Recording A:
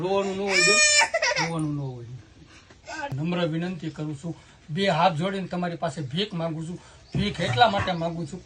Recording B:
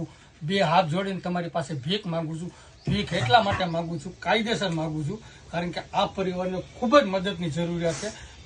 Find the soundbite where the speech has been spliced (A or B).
A